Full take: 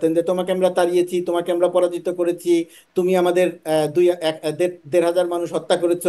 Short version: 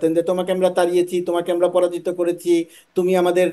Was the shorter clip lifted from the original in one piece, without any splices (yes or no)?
yes